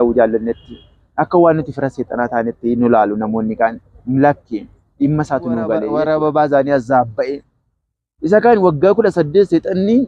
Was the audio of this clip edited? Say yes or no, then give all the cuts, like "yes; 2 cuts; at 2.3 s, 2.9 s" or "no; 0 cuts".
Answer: yes; 1 cut; at 5.9 s